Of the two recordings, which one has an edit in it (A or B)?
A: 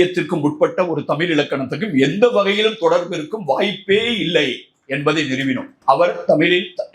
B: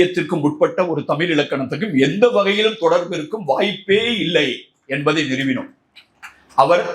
A